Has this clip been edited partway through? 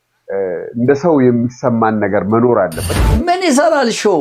yes; 1 cut; at 3.0 s

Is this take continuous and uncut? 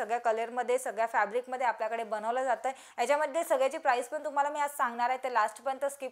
no; 1 cut; at 2.8 s

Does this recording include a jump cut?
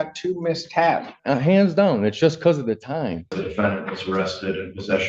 yes; 2 cuts; at 1.1 s, 3.4 s

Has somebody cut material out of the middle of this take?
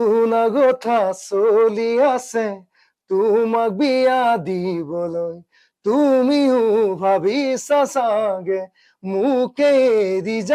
no; 0 cuts

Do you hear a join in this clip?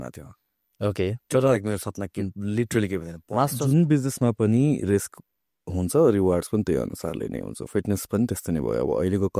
yes; 1 cut; at 3.5 s

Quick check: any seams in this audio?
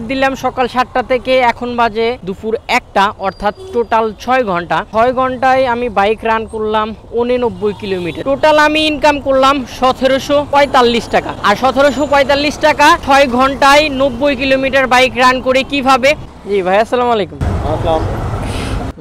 yes; 6 cuts; at 2.3 s, 8.2 s, 10.5 s, 11.3 s, 13.0 s, 16.4 s

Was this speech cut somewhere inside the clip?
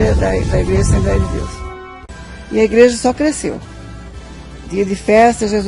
yes; 1 cut; at 2.1 s

